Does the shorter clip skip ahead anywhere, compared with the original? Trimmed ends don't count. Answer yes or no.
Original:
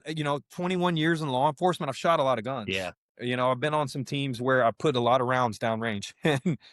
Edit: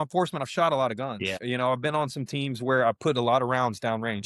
yes